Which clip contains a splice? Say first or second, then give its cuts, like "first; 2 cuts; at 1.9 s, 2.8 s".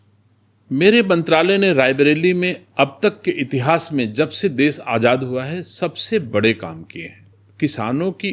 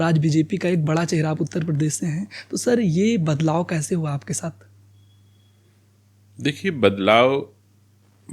first; 1 cut; at 7.4 s